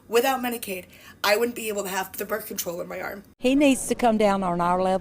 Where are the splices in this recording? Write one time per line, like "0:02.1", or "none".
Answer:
0:03.2